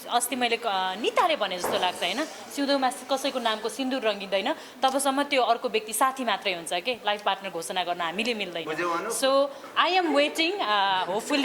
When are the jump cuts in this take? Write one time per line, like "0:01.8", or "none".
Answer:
none